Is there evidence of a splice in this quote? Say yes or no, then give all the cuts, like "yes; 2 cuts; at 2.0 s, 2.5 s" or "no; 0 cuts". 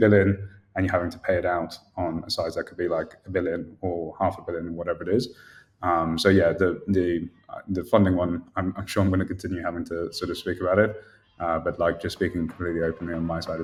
no; 0 cuts